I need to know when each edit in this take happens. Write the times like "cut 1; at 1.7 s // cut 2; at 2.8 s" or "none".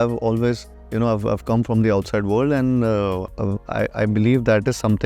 cut 1; at 3.3 s